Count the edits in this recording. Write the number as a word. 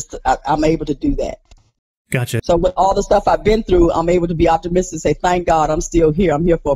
one